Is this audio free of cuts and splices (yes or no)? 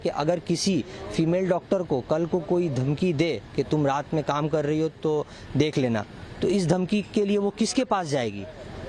yes